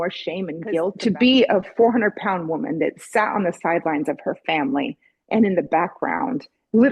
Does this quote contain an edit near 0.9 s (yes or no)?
yes